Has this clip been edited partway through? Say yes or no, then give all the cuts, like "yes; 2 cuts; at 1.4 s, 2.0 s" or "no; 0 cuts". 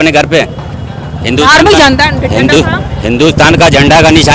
no; 0 cuts